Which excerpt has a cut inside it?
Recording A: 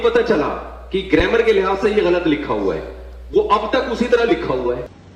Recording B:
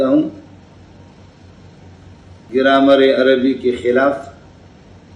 B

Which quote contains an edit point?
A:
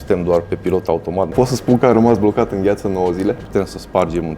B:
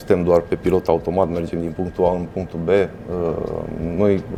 A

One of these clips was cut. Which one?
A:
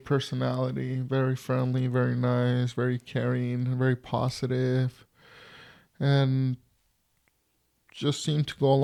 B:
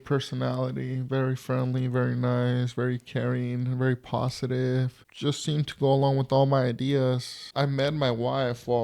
B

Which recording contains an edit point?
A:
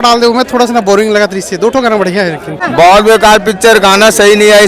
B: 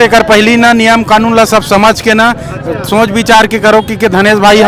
A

